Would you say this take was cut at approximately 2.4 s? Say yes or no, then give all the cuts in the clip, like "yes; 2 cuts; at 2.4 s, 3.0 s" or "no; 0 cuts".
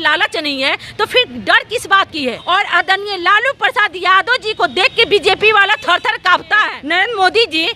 yes; 2 cuts; at 2.4 s, 6.8 s